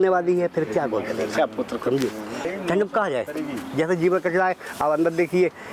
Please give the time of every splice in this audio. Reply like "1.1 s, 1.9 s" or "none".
none